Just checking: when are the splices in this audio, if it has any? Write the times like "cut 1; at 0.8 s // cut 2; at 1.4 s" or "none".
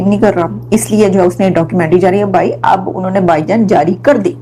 none

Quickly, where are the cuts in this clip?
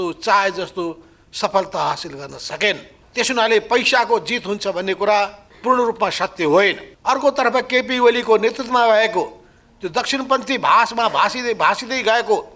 cut 1; at 3.0 s // cut 2; at 5.5 s // cut 3; at 6.9 s

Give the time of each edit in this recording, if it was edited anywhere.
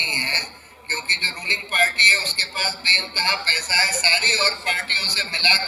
none

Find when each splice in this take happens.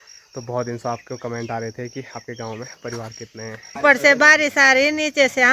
cut 1; at 3.8 s

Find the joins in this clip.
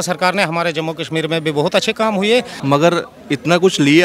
cut 1; at 2.5 s

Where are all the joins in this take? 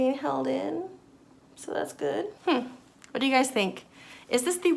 cut 1; at 2.3 s

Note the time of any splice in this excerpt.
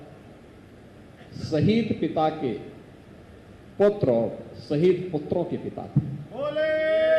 none

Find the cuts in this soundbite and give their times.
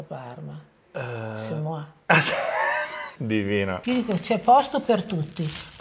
cut 1; at 3.1 s // cut 2; at 3.8 s

